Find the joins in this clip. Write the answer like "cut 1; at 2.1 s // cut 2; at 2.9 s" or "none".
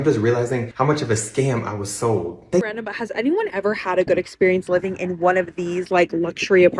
cut 1; at 2.6 s